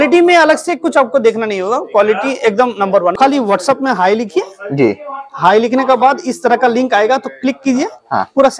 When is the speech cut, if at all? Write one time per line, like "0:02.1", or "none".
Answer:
0:03.1